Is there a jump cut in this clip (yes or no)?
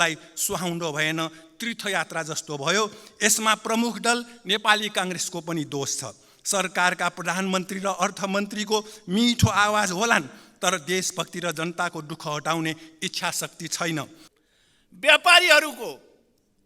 yes